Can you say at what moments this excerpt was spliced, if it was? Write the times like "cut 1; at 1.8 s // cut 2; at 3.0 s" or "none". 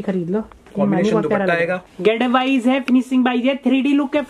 cut 1; at 1.9 s